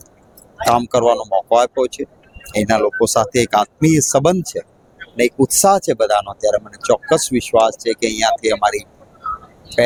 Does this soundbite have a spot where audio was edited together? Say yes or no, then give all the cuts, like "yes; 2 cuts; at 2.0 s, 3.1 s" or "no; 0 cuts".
no; 0 cuts